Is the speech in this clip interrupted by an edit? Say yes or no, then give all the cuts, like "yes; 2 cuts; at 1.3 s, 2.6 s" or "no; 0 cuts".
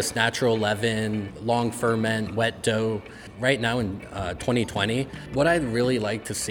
yes; 3 cuts; at 1.3 s, 3.2 s, 5.2 s